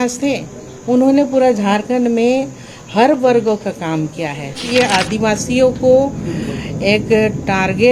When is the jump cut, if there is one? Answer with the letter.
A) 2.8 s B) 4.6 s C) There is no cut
B